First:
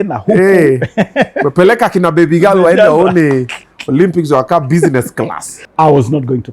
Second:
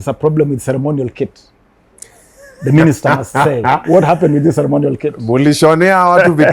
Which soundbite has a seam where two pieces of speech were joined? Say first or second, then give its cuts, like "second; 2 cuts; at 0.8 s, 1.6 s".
first; 1 cut; at 5.6 s